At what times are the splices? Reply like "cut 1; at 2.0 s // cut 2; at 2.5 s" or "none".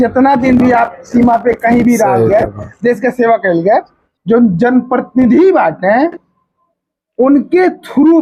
cut 1; at 4.0 s